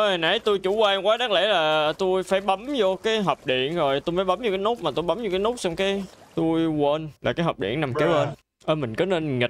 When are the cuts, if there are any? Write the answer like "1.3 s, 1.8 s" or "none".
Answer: 8.3 s